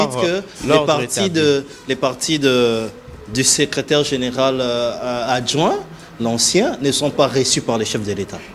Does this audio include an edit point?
no; 0 cuts

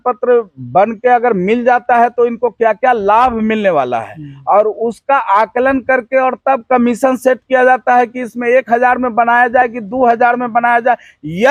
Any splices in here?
no; 0 cuts

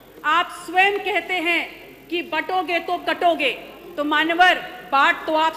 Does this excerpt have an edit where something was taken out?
no; 0 cuts

